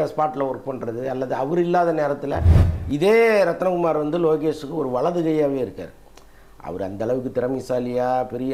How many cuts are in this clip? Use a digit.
1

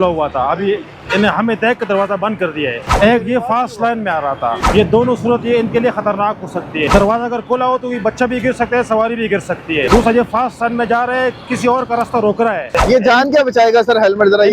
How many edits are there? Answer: 5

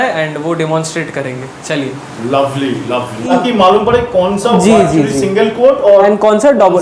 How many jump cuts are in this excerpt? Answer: 1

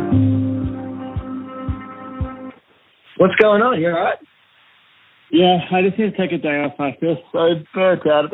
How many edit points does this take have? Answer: 0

